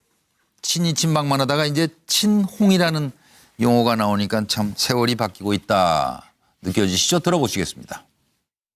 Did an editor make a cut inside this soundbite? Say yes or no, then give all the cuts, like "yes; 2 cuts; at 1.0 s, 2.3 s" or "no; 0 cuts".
yes; 1 cut; at 4.3 s